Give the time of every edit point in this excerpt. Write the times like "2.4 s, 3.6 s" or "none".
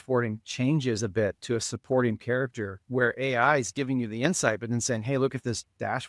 none